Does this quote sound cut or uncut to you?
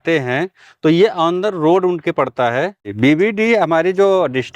cut